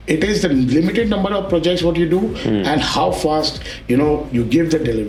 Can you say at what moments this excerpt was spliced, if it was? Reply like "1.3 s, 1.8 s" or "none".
none